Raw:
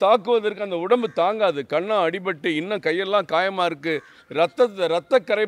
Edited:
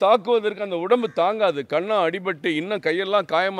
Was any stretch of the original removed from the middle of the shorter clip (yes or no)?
no